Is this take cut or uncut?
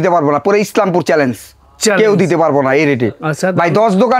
uncut